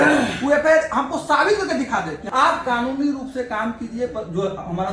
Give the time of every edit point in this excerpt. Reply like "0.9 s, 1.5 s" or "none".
2.2 s